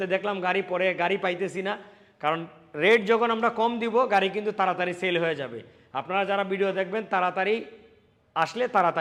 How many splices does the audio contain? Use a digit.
0